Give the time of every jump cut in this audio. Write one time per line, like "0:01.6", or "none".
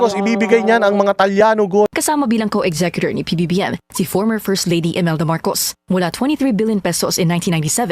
0:02.0